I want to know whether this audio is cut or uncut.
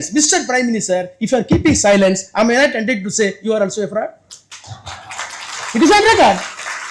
uncut